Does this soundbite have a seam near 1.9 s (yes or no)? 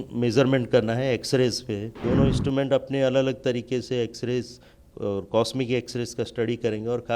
yes